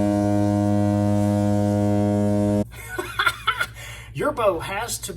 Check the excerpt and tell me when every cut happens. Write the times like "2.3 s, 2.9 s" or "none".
2.8 s